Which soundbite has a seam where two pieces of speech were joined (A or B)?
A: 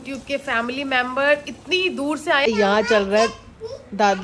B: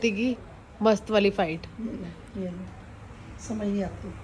A